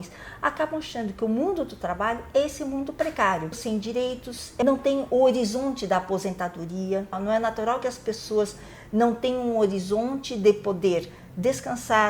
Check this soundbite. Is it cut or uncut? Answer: cut